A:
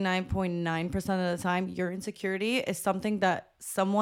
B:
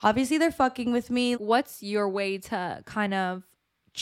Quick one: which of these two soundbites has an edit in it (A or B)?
B